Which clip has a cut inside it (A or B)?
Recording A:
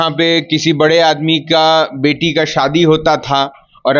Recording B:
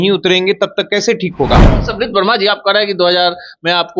B